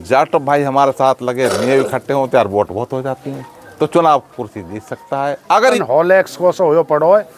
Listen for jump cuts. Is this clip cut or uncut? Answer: cut